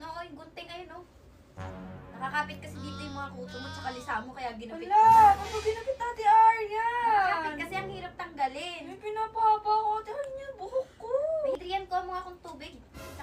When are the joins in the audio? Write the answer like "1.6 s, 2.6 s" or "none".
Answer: 1.8 s, 11.6 s